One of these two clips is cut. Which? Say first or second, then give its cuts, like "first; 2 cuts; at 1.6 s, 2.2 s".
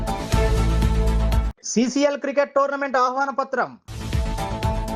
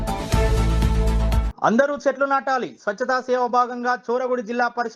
second; 1 cut; at 1.5 s